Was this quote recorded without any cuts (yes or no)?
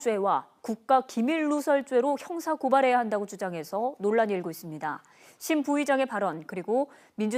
yes